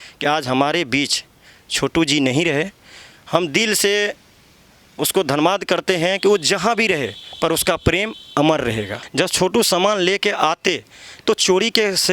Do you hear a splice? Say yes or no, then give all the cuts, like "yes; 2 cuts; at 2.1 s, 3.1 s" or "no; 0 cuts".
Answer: yes; 1 cut; at 9.0 s